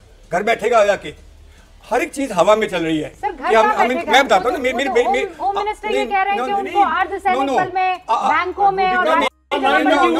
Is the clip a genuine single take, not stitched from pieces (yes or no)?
yes